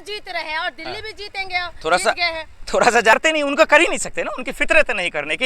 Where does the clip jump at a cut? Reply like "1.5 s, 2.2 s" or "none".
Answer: 3.1 s